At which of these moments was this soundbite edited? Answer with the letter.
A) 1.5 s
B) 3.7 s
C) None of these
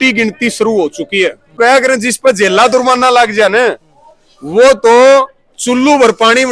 A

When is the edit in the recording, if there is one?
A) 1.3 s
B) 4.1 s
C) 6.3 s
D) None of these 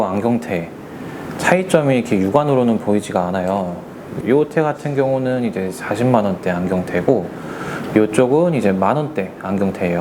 B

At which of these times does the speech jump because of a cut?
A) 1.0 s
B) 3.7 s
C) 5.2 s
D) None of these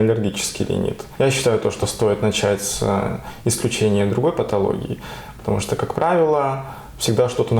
A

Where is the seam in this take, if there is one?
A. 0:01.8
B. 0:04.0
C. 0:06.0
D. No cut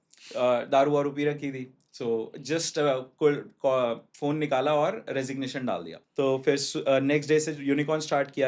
C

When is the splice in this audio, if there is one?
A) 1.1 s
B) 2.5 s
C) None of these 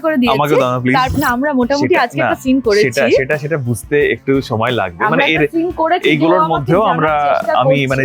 A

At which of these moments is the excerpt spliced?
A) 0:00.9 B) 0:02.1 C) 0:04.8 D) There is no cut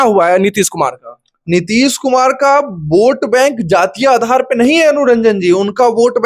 D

